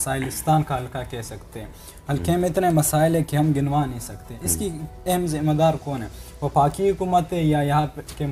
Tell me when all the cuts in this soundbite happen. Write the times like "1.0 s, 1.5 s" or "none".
none